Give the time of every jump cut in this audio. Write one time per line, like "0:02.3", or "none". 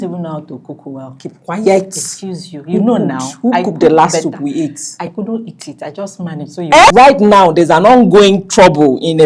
0:06.9